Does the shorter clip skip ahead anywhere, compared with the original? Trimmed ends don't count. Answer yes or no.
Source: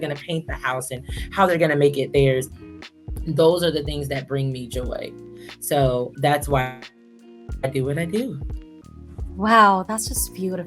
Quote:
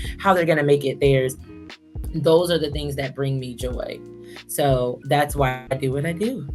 yes